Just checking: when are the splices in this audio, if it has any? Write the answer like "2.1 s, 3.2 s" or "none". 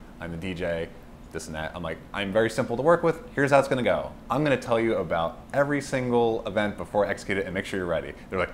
none